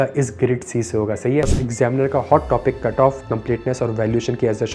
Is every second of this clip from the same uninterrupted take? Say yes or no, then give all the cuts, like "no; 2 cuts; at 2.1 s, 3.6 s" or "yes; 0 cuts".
no; 1 cut; at 1.6 s